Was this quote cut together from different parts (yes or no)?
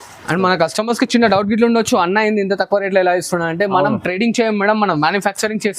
no